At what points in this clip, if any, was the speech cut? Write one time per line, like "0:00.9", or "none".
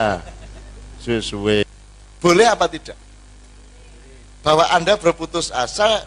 0:01.6